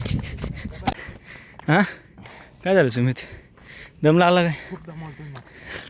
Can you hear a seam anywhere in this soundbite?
yes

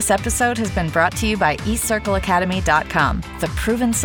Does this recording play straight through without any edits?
yes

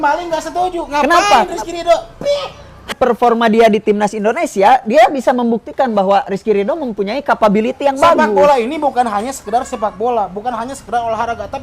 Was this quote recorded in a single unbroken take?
no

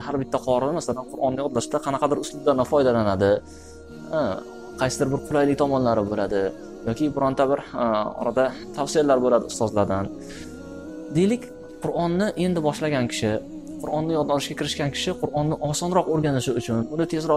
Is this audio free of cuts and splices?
yes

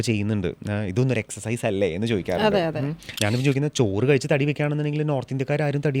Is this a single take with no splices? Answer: no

